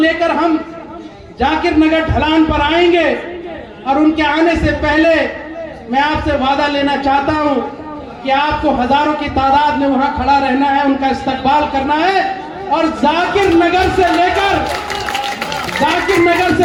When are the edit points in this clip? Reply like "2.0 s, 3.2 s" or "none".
none